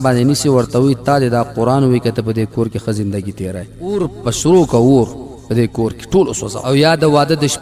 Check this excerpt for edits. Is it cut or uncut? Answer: cut